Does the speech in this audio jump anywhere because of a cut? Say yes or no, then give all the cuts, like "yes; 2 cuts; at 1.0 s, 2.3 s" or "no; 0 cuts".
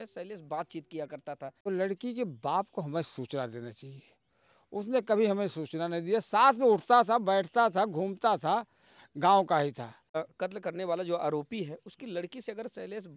yes; 2 cuts; at 1.5 s, 10.2 s